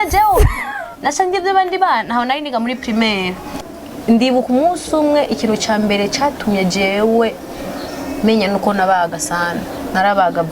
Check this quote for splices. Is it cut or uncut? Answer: cut